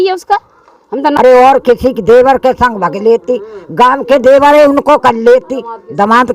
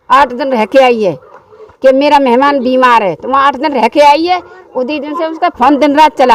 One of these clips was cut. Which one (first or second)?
first